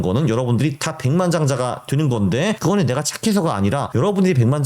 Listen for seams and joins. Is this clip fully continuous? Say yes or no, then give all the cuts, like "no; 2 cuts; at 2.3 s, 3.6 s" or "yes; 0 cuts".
no; 2 cuts; at 2.6 s, 3.9 s